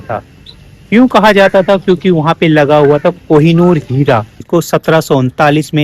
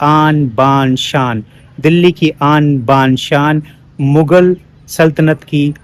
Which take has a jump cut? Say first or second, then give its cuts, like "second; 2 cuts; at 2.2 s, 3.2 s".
first; 1 cut; at 4.1 s